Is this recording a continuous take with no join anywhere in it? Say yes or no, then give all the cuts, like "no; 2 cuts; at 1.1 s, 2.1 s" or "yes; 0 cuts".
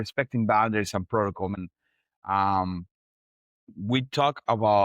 no; 1 cut; at 1.5 s